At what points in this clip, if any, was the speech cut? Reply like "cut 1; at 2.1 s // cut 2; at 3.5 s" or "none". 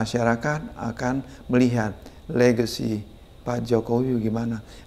none